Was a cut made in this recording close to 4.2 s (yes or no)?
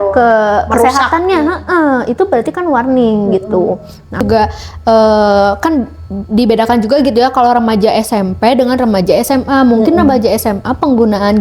yes